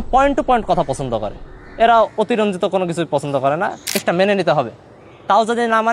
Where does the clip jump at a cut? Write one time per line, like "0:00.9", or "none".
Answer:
0:04.0